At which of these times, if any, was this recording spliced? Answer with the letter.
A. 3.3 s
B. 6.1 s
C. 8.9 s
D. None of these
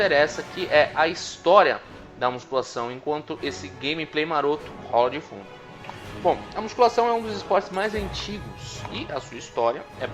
A